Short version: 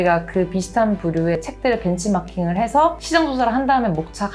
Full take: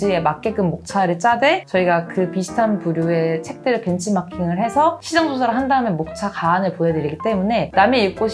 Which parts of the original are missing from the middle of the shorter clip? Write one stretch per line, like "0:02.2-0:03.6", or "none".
0:03.2-0:03.4